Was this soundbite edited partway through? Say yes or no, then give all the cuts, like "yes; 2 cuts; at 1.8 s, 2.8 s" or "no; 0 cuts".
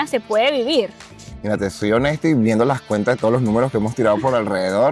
no; 0 cuts